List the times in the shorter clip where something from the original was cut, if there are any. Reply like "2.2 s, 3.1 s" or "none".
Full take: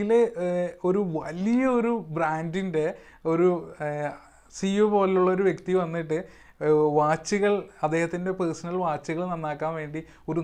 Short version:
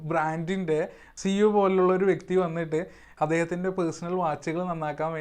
1.0 s, 3.1 s